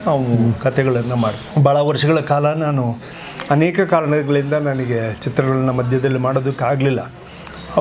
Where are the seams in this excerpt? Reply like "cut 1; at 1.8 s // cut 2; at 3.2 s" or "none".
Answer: cut 1; at 1.5 s